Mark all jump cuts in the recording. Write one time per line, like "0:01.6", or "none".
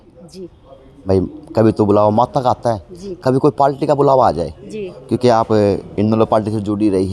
none